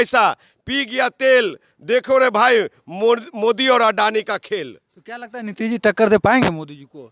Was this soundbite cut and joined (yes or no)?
no